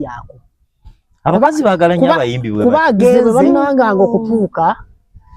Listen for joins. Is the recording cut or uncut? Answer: cut